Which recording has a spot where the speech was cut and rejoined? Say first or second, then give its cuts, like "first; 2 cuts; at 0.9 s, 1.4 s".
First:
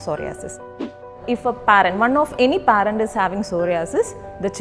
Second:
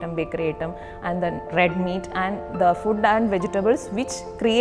first; 1 cut; at 0.9 s